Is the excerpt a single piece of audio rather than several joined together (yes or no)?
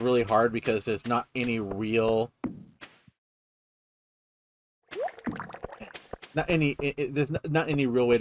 yes